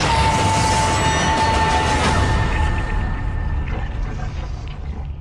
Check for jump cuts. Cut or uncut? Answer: uncut